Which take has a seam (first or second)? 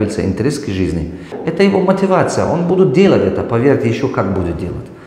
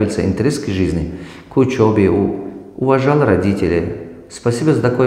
first